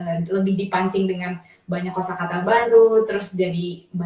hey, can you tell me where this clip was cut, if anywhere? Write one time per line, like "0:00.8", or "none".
none